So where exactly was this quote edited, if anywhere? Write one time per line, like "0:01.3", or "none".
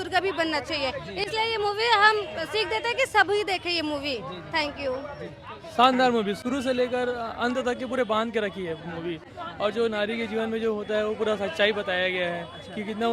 none